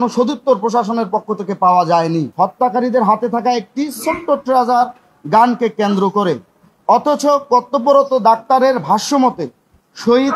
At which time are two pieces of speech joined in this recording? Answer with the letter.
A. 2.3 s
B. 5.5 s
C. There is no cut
A